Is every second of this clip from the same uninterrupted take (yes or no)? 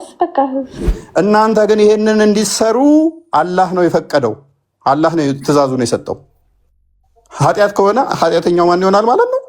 no